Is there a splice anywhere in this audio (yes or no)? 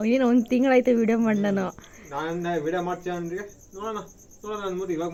no